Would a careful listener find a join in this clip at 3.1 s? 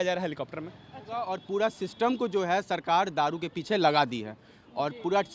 no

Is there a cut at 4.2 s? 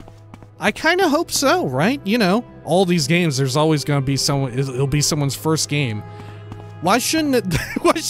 no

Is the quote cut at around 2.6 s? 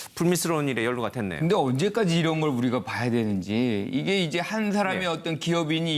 no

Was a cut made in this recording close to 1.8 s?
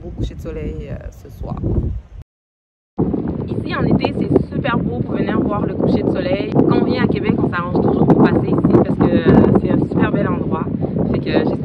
no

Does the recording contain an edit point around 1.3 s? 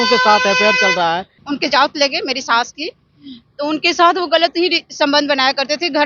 yes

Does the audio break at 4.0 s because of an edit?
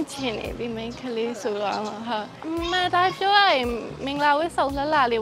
no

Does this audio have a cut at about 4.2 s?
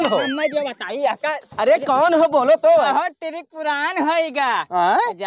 no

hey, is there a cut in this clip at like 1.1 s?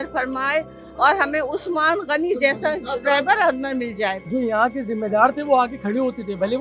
no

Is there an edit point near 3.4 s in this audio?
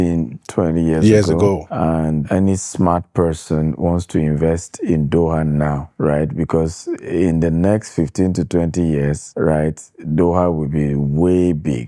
no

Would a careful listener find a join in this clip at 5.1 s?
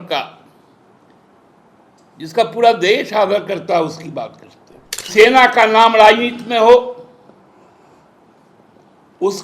yes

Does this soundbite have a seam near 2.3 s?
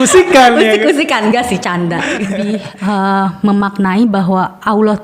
yes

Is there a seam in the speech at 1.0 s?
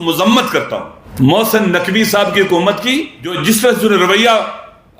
yes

